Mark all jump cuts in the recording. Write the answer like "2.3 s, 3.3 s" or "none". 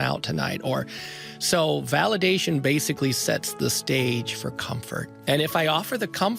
5.1 s